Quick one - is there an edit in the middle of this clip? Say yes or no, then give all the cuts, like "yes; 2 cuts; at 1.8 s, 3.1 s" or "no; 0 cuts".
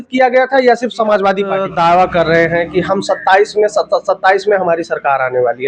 yes; 1 cut; at 1.6 s